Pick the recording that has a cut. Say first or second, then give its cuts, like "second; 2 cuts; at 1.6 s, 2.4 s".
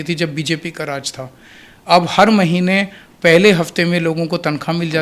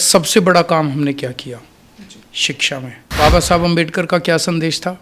second; 1 cut; at 3.2 s